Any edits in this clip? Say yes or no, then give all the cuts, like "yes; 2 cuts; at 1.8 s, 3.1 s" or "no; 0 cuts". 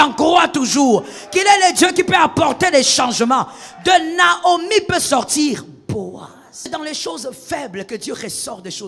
yes; 1 cut; at 6.7 s